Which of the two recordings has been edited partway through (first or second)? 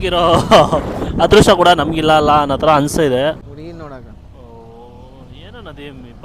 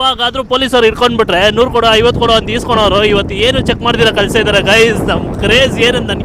first